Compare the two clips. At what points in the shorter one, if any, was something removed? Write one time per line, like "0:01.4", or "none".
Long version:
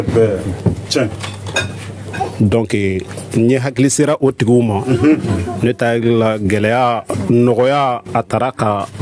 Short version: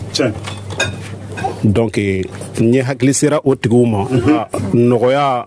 0:04.4